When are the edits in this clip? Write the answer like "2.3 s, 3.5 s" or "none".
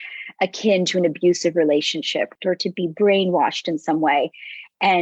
2.3 s